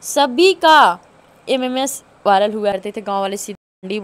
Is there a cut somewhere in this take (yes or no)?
yes